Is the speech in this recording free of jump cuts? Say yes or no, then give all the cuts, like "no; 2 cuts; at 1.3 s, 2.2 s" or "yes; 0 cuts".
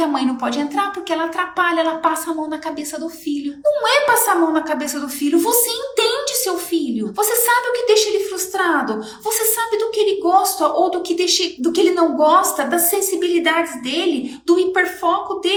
yes; 0 cuts